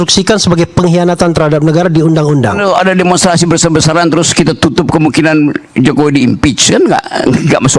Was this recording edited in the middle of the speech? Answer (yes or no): yes